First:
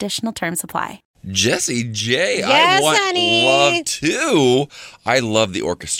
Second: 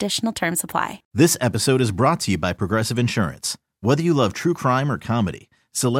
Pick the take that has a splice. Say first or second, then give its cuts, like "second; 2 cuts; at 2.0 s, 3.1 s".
second; 1 cut; at 1.0 s